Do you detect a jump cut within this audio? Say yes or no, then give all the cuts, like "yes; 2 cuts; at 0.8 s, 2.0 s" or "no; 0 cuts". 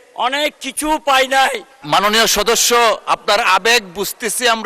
yes; 1 cut; at 1.7 s